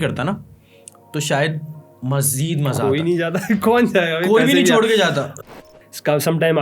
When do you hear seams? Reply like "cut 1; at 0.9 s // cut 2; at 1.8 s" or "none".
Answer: cut 1; at 5.5 s